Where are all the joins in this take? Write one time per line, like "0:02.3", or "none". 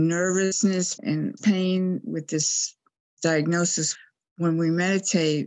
0:04.0